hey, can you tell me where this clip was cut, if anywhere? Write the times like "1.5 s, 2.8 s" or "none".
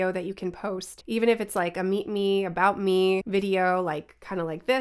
0.9 s, 3.2 s